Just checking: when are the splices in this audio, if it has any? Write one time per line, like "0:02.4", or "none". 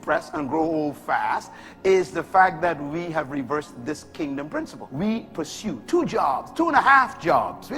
0:04.8